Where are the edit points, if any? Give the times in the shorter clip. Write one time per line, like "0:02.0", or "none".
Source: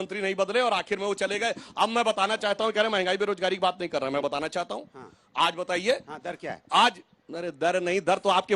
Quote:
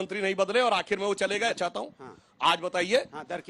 0:01.6